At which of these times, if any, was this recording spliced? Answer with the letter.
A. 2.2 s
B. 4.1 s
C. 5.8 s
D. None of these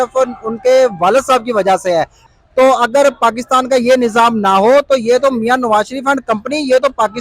A